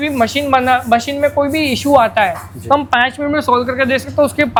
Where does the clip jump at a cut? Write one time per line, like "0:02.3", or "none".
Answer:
none